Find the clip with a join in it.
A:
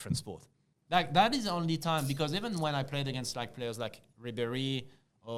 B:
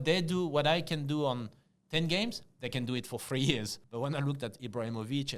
B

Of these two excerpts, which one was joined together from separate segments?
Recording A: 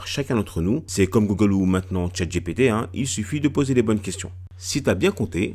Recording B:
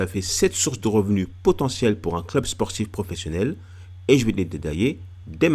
A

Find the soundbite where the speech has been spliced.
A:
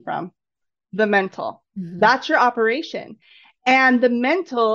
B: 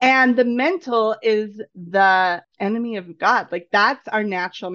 B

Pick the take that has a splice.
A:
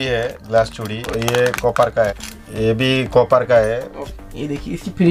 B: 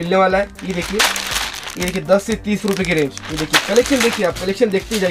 A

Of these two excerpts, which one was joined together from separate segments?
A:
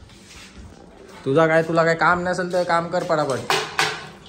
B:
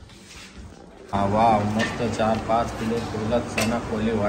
B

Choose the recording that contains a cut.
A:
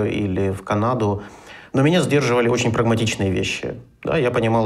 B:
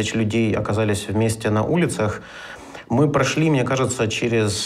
B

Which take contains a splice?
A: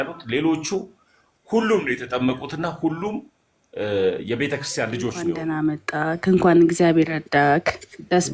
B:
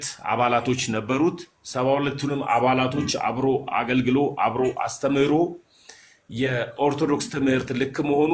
A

